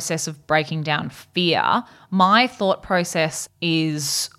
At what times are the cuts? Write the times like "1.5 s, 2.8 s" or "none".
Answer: 3.4 s